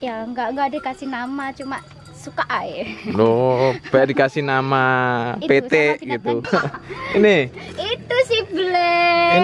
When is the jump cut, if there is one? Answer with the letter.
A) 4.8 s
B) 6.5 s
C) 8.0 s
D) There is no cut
B